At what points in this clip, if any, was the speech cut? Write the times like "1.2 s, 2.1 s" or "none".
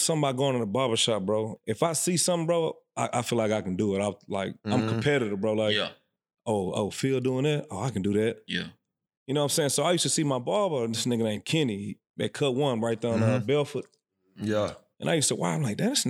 1.5 s